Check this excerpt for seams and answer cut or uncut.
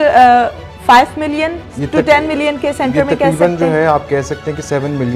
uncut